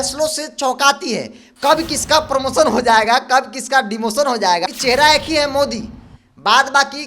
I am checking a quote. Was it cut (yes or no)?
yes